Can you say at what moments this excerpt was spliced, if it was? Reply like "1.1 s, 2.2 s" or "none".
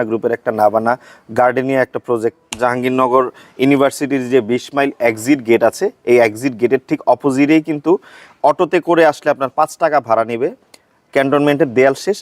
2.5 s